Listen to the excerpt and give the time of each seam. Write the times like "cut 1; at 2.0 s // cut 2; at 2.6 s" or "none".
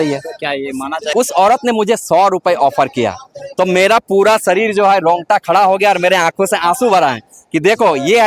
cut 1; at 1.0 s